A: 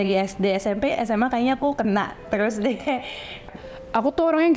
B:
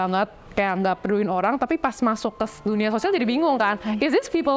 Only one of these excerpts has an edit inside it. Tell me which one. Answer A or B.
A